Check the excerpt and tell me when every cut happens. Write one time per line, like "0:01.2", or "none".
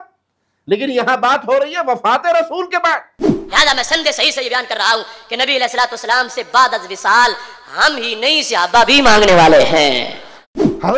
0:03.4